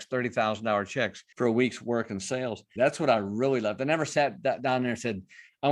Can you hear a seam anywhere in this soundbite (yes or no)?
yes